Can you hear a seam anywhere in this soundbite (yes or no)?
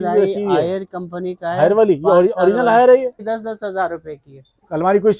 yes